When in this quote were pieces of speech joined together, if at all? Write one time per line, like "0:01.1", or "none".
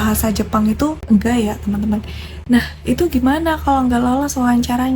0:02.4